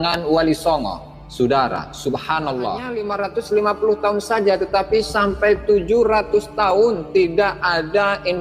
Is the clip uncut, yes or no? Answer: no